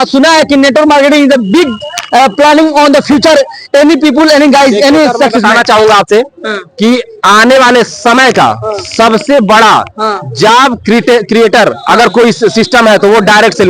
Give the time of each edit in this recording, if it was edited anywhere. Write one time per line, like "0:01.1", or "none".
none